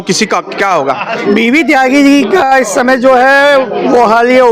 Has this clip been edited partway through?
yes; 1 cut; at 1.1 s

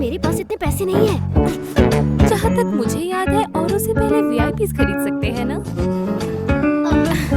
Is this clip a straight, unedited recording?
no; 2 cuts; at 2.3 s, 6.3 s

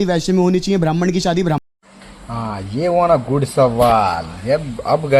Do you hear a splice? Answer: no; 0 cuts

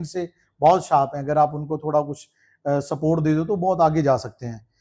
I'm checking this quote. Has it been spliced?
no; 0 cuts

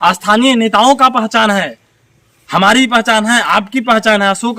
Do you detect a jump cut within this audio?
no; 0 cuts

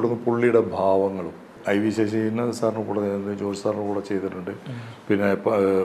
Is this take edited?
yes; 1 cut; at 1.5 s

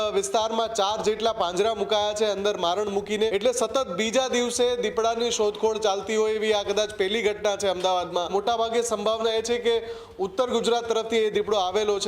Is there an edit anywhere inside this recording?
yes; 2 cuts; at 3.3 s, 8.3 s

